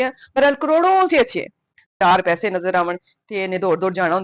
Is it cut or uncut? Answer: cut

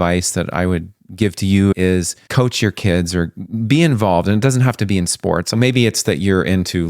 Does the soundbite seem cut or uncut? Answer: cut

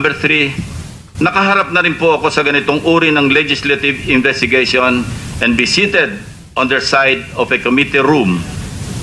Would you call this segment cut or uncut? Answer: cut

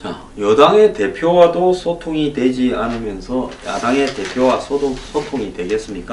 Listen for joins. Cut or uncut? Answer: cut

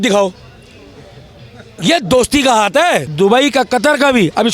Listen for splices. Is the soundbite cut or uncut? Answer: cut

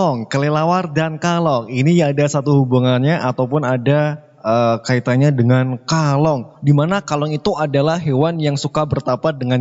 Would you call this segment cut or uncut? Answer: uncut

